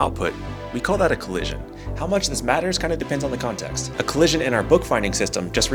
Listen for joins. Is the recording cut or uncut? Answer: uncut